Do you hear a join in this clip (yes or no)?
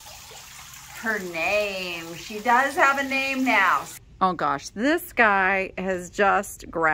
yes